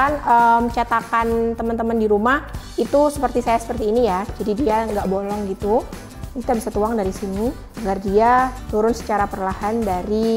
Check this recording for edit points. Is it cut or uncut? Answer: uncut